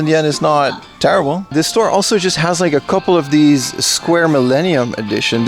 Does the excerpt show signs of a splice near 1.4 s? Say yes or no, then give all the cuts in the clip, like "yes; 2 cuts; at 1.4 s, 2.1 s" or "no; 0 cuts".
yes; 1 cut; at 1.4 s